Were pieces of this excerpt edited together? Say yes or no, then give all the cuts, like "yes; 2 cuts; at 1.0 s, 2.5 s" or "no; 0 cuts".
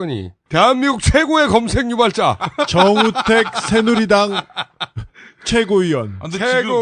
no; 0 cuts